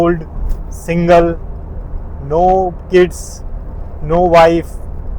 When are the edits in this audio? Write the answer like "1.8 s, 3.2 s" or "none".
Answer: none